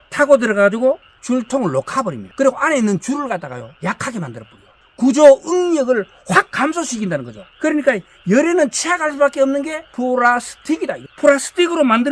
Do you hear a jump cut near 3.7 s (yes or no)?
yes